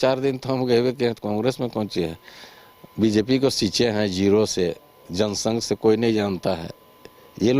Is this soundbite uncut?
yes; 0 cuts

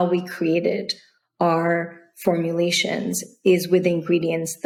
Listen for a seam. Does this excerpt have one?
no; 0 cuts

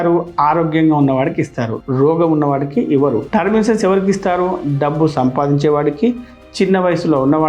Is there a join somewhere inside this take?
no; 0 cuts

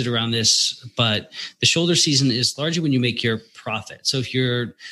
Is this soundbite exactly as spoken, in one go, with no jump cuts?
yes; 0 cuts

